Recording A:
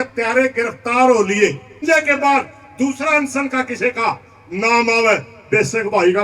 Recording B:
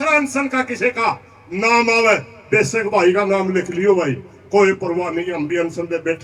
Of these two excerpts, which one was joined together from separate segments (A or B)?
A